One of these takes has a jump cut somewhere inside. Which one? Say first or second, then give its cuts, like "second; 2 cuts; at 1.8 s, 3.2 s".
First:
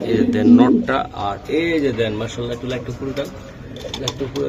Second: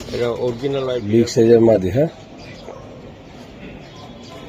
second; 1 cut; at 1.0 s